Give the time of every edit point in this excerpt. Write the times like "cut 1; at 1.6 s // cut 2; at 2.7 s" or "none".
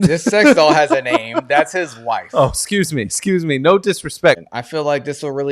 cut 1; at 4.4 s